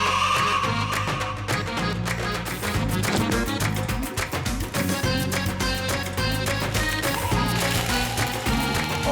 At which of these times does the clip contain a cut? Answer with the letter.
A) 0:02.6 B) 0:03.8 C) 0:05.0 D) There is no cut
A